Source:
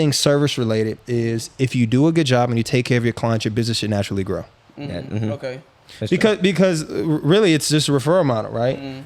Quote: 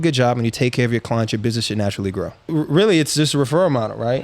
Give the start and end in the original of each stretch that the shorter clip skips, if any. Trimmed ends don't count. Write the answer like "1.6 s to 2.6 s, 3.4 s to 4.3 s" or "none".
4.5 s to 7.0 s